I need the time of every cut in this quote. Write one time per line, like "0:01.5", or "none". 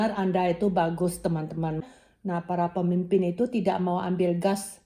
0:01.8